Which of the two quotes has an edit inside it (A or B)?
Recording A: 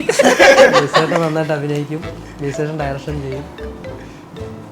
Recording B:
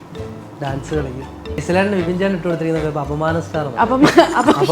B